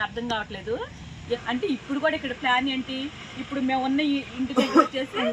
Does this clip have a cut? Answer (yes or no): yes